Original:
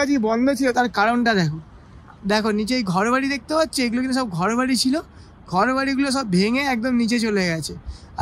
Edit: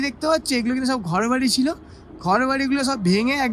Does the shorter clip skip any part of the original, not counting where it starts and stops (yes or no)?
no